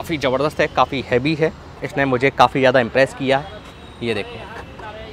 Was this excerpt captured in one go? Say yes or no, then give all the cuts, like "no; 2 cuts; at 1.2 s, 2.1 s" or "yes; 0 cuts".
no; 1 cut; at 1.9 s